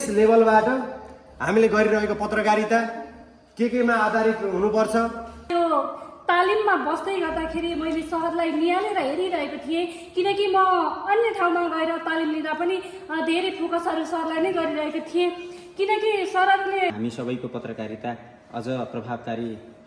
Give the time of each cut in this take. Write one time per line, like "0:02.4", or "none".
0:05.5
0:16.9